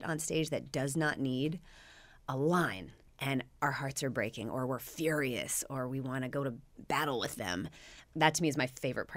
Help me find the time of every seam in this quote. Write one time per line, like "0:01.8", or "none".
none